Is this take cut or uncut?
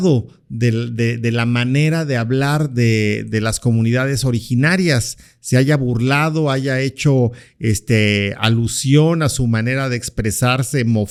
uncut